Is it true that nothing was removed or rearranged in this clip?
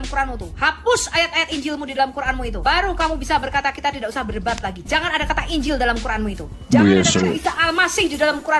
yes; 0 cuts

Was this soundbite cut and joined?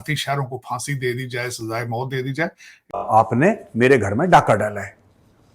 yes; 1 cut; at 3.0 s

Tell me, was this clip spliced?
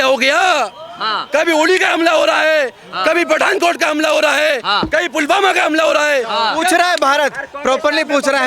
no; 0 cuts

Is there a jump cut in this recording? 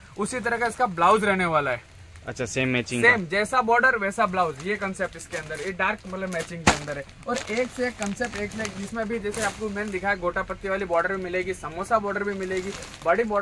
no; 0 cuts

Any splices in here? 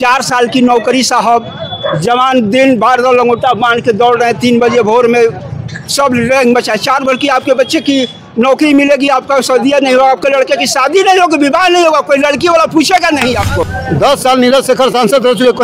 yes; 1 cut; at 13.7 s

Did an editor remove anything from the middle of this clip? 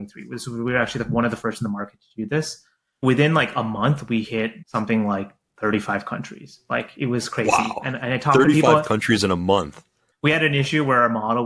yes; 3 cuts; at 3.0 s, 4.6 s, 10.0 s

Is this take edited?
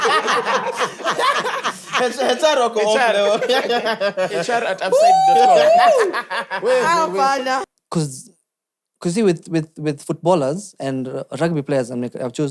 yes; 1 cut; at 7.7 s

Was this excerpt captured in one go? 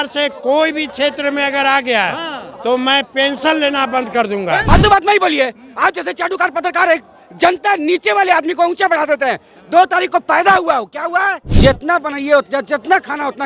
no; 2 cuts; at 4.6 s, 11.4 s

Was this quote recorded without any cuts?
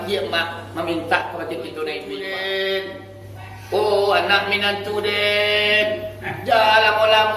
no; 1 cut; at 2.1 s

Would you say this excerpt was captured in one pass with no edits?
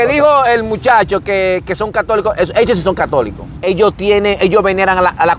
no; 1 cut; at 3.4 s

